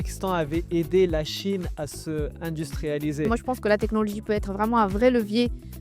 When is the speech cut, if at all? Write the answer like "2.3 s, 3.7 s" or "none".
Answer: 3.4 s